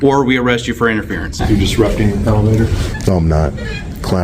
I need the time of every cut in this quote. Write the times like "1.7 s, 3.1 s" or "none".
1.4 s, 2.9 s